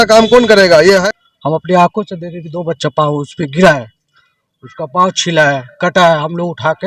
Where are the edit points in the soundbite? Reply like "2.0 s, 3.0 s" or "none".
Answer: 1.0 s